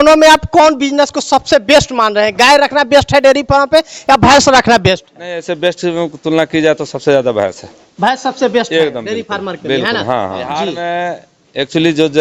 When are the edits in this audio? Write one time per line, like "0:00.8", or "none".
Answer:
0:10.6